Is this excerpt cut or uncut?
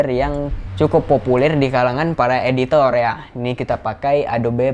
uncut